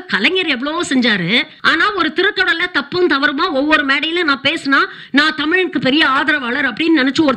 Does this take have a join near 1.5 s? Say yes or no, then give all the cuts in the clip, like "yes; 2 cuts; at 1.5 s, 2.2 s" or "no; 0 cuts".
no; 0 cuts